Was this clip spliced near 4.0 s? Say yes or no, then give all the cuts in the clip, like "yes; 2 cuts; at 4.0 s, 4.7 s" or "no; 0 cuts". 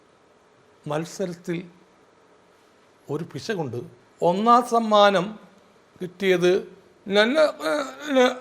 yes; 1 cut; at 4.0 s